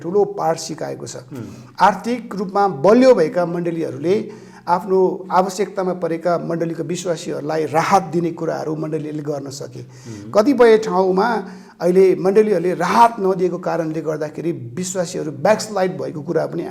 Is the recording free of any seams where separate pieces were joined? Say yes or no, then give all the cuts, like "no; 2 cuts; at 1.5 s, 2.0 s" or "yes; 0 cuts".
yes; 0 cuts